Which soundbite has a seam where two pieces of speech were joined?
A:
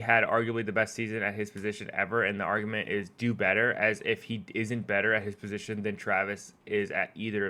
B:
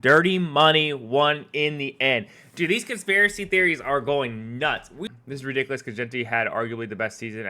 B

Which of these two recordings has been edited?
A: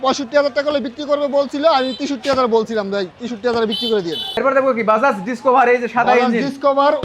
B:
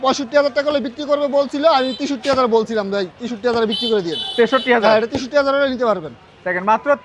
A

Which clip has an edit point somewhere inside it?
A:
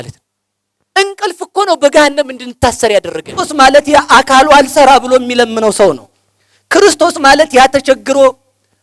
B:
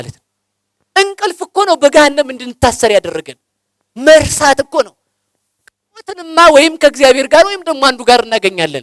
A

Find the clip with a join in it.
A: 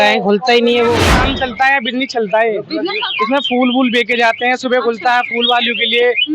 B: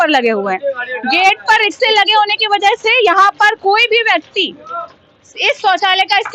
A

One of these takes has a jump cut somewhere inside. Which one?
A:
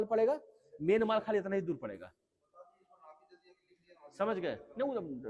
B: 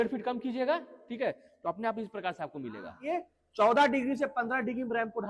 B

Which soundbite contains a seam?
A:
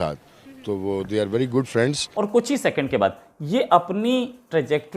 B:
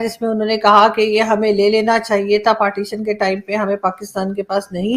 A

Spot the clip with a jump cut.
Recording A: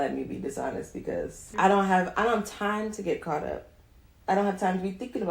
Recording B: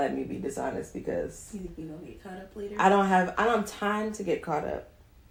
A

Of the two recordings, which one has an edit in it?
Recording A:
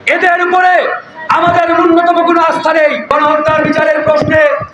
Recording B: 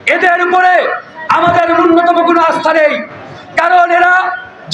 A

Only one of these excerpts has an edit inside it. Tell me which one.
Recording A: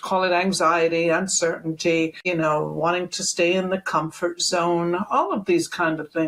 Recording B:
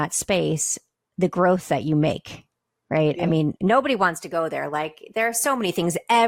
A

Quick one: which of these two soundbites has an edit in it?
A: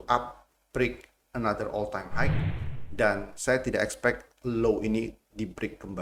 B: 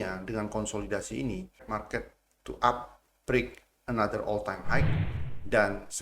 B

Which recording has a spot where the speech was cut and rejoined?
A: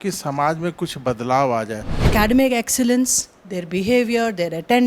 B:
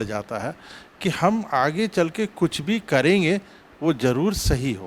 A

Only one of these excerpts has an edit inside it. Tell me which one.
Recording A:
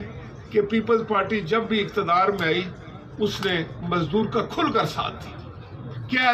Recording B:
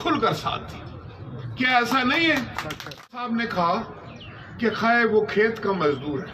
B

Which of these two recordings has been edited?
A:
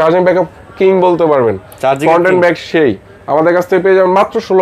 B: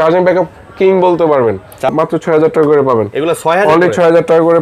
B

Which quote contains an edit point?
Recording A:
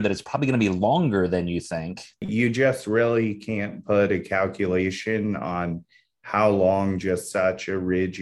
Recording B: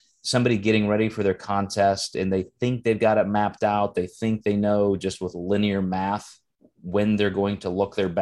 A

